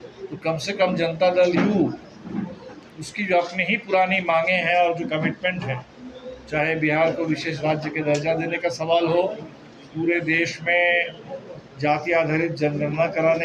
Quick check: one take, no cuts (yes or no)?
yes